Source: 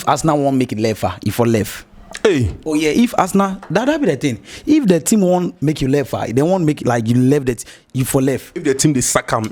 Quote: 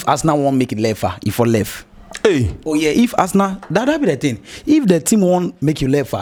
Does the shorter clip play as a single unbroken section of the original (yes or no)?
yes